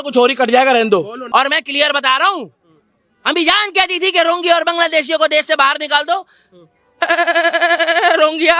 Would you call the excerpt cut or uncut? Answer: cut